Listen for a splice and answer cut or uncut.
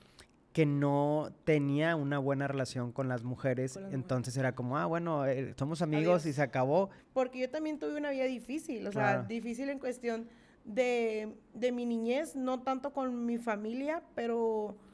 cut